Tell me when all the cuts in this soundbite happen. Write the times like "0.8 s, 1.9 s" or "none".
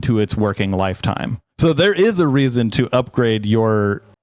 1.4 s